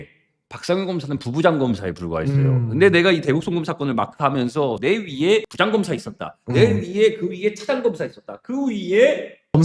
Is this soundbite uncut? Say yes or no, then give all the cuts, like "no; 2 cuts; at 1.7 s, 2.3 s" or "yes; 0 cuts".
yes; 0 cuts